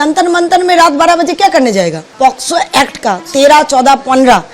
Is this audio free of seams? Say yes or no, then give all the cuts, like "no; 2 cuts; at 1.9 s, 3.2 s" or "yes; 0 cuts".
no; 1 cut; at 2.0 s